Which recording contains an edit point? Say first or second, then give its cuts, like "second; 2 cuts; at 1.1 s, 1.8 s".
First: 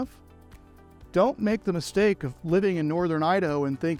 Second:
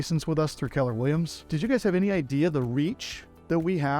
second; 1 cut; at 1.4 s